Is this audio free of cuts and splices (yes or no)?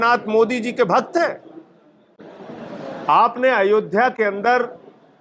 yes